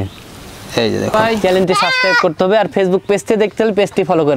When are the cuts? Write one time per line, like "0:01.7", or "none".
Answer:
0:01.1